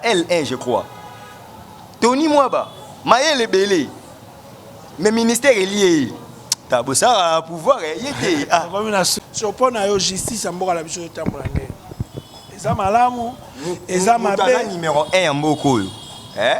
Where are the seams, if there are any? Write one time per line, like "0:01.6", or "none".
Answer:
0:09.2